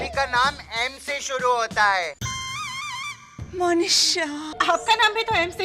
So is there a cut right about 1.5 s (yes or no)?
no